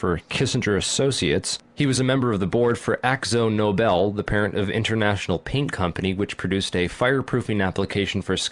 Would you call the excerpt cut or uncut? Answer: uncut